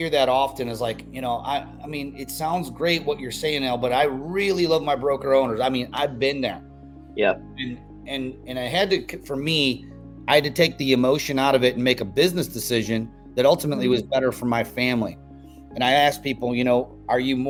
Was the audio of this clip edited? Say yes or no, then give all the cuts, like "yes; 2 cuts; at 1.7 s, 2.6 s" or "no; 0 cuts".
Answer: no; 0 cuts